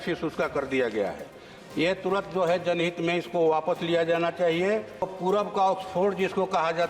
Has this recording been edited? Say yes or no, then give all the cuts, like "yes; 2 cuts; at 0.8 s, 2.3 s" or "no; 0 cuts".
yes; 1 cut; at 5.1 s